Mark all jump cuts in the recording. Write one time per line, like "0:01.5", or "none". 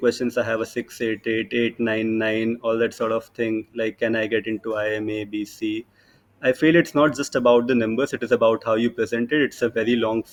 none